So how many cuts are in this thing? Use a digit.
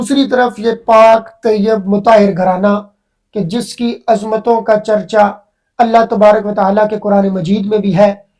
0